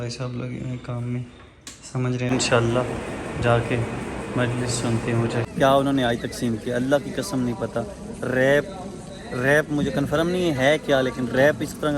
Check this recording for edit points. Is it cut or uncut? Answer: cut